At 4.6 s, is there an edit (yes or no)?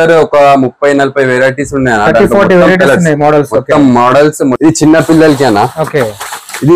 yes